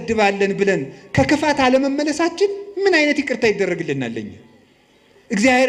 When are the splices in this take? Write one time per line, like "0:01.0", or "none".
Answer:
none